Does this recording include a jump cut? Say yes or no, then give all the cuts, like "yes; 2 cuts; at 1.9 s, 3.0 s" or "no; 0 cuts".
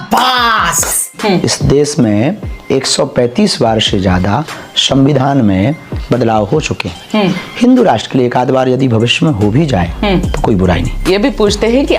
yes; 2 cuts; at 1.1 s, 11.0 s